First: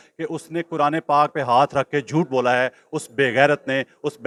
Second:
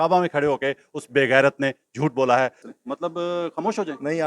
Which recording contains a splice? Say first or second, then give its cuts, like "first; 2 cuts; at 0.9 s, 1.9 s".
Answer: second; 1 cut; at 2.6 s